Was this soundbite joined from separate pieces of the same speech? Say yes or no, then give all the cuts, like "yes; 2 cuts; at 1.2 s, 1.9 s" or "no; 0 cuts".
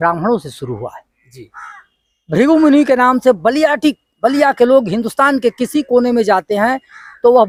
no; 0 cuts